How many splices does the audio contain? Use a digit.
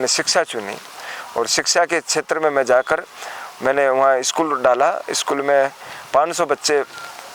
0